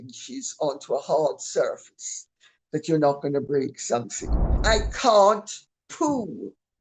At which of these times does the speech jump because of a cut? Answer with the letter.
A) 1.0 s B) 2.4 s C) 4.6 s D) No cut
C